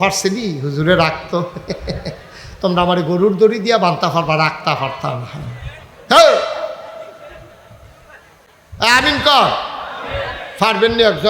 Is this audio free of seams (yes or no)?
yes